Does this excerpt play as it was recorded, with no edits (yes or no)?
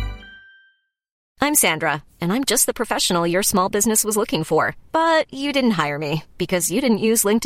no